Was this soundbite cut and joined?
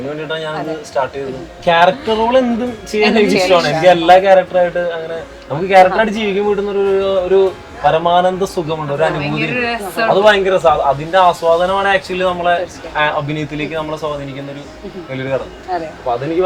yes; 1 cut; at 1.6 s

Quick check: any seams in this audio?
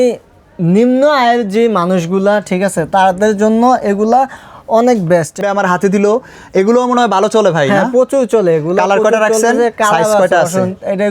yes; 1 cut; at 5.4 s

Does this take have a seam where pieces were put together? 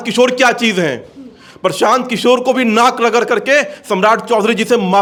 no; 0 cuts

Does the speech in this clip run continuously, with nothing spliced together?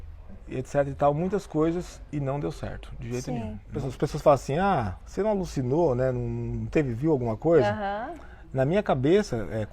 no; 1 cut; at 3.8 s

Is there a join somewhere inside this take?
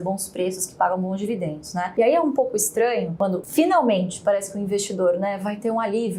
no; 0 cuts

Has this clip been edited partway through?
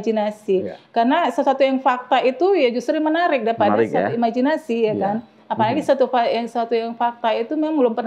no; 0 cuts

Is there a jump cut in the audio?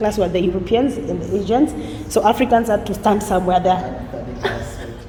no; 0 cuts

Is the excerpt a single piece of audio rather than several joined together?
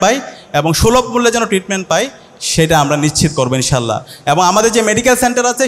yes; 0 cuts

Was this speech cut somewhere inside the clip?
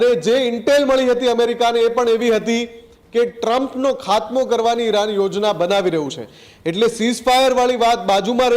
no; 0 cuts

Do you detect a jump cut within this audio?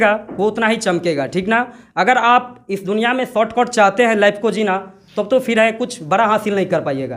no; 0 cuts

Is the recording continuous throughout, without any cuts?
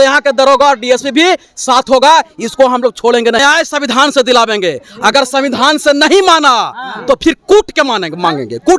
no; 1 cut; at 3.4 s

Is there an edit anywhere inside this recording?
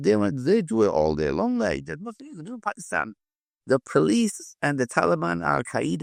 no; 0 cuts

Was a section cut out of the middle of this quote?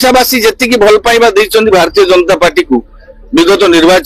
no; 0 cuts

